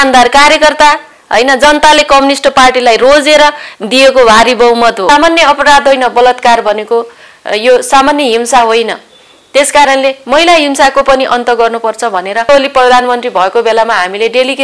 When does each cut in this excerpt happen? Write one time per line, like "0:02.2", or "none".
0:05.0
0:12.5